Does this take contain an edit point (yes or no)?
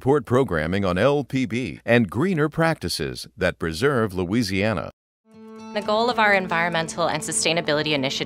no